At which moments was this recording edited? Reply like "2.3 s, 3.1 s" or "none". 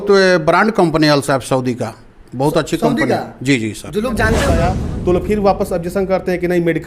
4.5 s